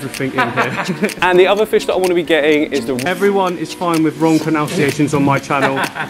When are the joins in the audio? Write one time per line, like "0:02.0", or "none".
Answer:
0:01.1
0:03.0